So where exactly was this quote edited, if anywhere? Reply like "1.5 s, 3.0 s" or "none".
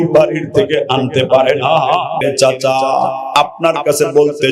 2.2 s